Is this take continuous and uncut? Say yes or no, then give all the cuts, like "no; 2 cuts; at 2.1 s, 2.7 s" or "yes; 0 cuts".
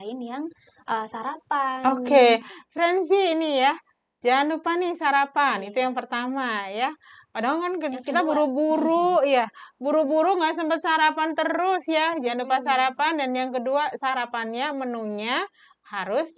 yes; 0 cuts